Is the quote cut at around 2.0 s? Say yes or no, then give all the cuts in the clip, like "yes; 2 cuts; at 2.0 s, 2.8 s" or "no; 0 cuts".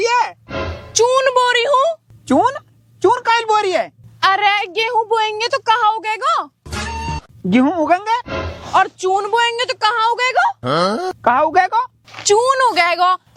no; 0 cuts